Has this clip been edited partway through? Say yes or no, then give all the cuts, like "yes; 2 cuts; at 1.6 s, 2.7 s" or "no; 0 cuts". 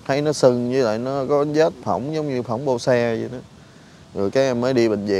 no; 0 cuts